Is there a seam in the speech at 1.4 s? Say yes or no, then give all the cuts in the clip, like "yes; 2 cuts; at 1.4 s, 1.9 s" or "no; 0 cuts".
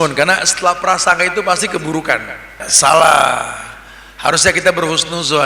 no; 1 cut; at 2.6 s